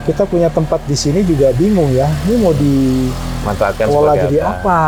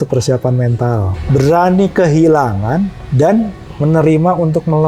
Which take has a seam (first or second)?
second